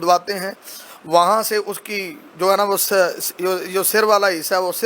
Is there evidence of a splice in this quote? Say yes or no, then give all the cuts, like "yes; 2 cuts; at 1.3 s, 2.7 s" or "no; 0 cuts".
no; 0 cuts